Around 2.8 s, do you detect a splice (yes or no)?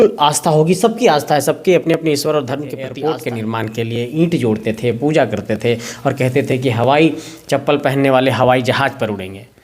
yes